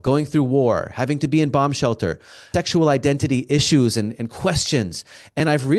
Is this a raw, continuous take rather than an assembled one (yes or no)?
yes